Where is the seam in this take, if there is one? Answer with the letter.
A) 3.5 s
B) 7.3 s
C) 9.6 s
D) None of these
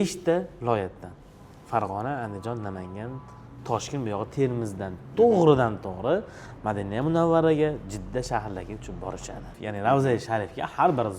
C